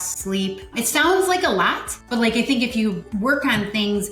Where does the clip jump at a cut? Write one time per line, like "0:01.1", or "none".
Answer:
0:02.8